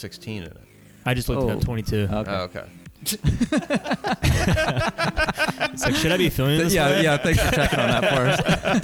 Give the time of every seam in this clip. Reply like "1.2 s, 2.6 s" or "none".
none